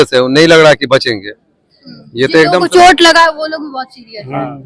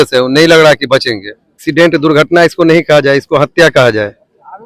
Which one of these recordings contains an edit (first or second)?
second